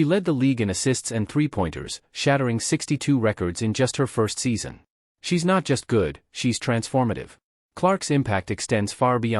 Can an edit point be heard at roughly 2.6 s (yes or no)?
yes